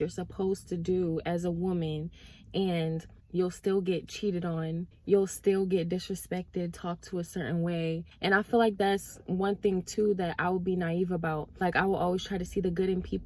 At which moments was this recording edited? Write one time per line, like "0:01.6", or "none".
0:03.2
0:04.9
0:08.0
0:11.5